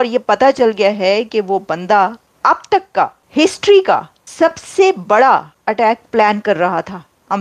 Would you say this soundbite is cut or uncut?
cut